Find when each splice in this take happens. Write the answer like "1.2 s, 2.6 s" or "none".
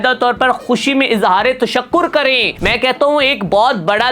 2.5 s